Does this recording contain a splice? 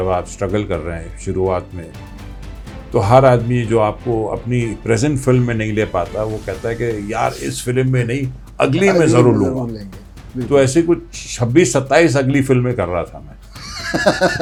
no; 0 cuts

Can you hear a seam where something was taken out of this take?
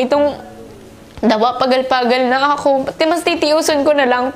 no; 0 cuts

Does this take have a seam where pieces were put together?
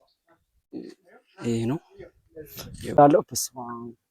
yes; 1 cut; at 3.0 s

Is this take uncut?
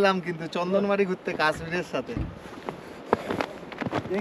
no; 1 cut; at 2.4 s

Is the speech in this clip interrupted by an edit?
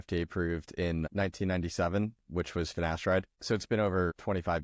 no; 0 cuts

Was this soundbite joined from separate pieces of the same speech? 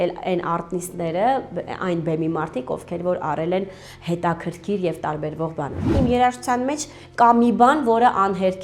yes; 1 cut; at 5.9 s

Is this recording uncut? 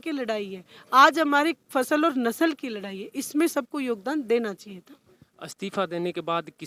yes; 0 cuts

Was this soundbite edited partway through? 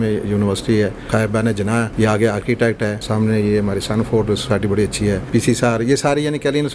yes; 3 cuts; at 1.5 s, 3.0 s, 5.2 s

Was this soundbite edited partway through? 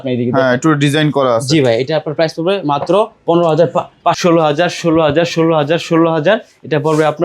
yes; 1 cut; at 4.2 s

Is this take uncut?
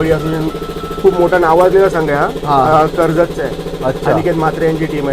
yes; 0 cuts

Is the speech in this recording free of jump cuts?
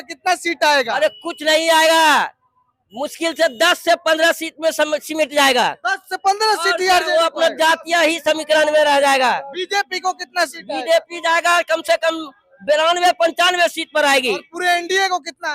yes; 0 cuts

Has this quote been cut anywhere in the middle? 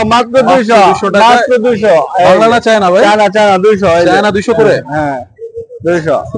no; 0 cuts

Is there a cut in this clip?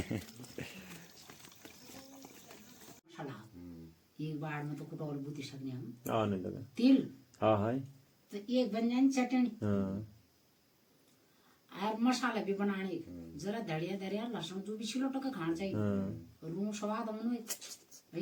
no; 0 cuts

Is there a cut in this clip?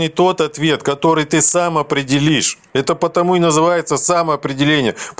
no; 0 cuts

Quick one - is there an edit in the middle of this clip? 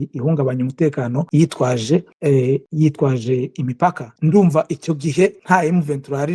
yes; 4 cuts; at 1.2 s, 2.4 s, 4.1 s, 5.4 s

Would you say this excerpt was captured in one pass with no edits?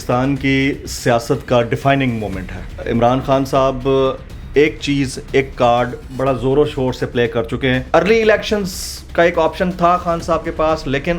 no; 2 cuts; at 2.7 s, 7.8 s

